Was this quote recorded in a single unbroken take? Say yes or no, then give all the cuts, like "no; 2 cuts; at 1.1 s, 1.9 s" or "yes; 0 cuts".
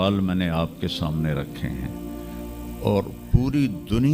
yes; 0 cuts